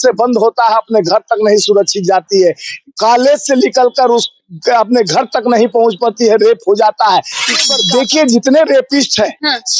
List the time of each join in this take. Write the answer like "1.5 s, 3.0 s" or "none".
7.6 s